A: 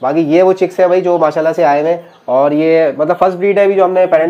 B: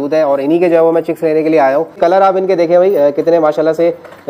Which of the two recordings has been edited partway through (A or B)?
B